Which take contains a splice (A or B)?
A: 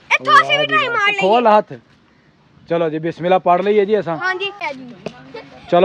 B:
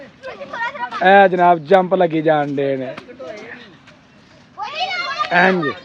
A